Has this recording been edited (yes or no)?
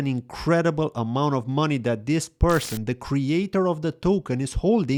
no